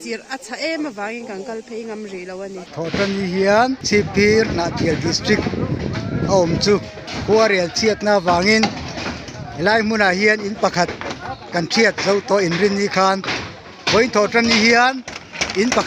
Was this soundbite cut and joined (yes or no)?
yes